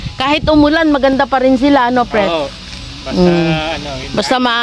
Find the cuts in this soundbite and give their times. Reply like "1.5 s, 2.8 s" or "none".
none